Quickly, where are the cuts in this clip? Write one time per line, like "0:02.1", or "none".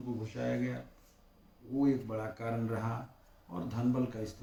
none